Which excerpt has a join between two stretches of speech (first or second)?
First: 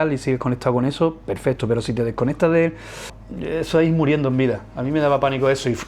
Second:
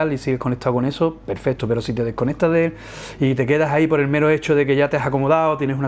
first